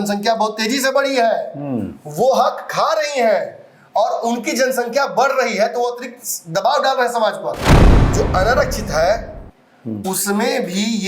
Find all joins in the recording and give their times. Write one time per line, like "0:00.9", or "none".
0:07.7